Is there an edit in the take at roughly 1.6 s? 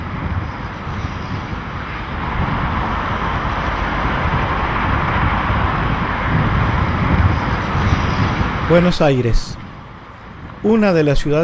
yes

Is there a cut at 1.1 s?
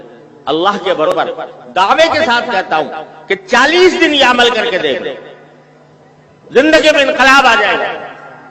yes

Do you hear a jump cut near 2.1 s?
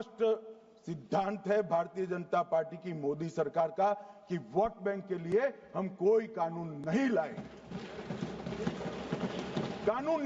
no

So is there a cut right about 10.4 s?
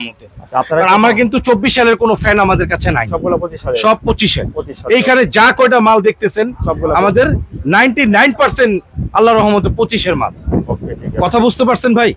no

